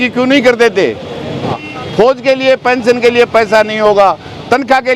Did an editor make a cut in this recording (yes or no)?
yes